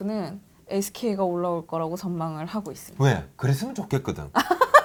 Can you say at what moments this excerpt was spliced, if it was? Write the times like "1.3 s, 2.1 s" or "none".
none